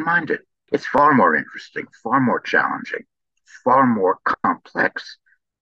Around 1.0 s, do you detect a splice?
yes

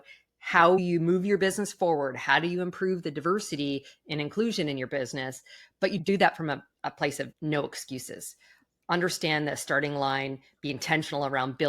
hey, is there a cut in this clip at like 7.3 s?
yes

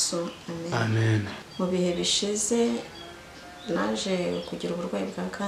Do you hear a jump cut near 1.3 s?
yes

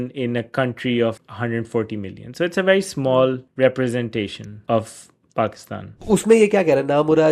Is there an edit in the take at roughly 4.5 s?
yes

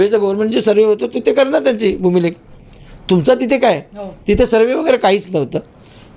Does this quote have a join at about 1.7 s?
no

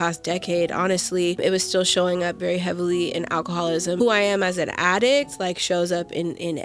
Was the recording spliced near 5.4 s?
no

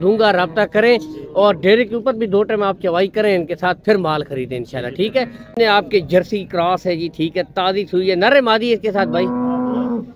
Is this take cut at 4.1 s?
no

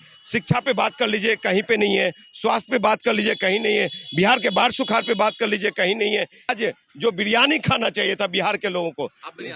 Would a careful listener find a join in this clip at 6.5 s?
yes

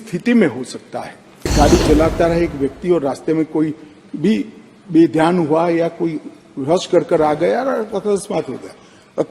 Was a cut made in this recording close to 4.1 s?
no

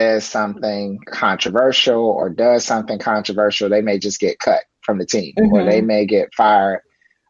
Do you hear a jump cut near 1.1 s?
yes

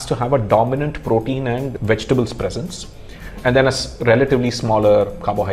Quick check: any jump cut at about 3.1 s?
no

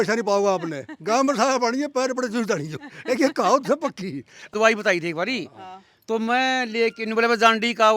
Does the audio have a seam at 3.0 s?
no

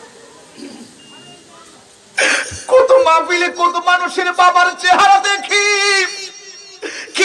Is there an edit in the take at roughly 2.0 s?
no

